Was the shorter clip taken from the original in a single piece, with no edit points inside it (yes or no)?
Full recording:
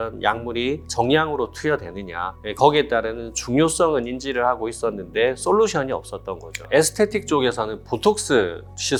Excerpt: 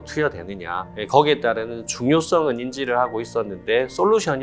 yes